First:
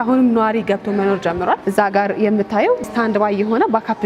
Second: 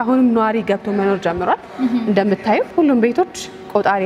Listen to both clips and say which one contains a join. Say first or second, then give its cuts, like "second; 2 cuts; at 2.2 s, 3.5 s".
first; 2 cuts; at 1.6 s, 2.8 s